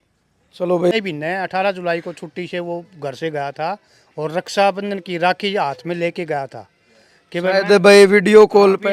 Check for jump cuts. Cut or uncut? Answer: cut